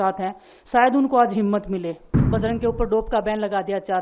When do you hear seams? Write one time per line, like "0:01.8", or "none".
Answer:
0:02.1